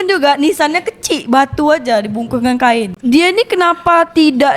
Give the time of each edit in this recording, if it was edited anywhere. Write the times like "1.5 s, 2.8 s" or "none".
2.9 s

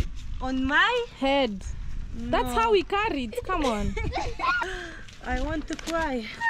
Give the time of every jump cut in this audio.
4.6 s

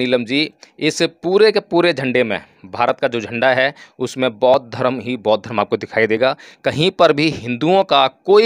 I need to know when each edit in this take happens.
none

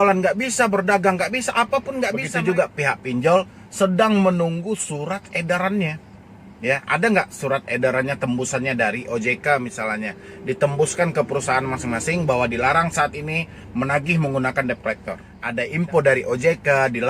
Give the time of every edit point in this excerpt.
2.3 s, 15.3 s

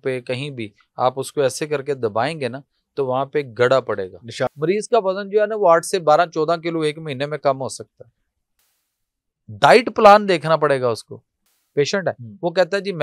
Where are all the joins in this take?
4.5 s, 11.5 s

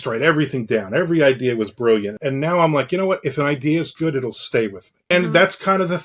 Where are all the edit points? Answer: 2.2 s, 4.9 s

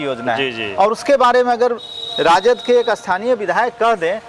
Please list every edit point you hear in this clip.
none

